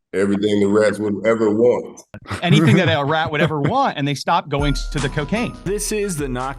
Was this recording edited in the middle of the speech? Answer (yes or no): yes